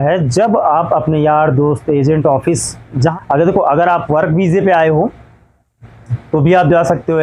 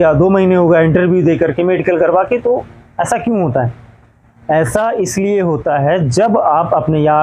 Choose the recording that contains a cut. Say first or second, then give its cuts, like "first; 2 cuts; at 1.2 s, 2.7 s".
first; 1 cut; at 2.9 s